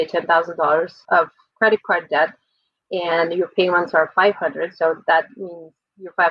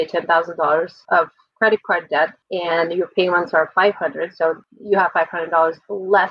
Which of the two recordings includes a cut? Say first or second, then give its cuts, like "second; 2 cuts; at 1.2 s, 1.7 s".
second; 2 cuts; at 2.4 s, 4.6 s